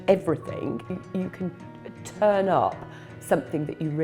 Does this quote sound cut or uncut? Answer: cut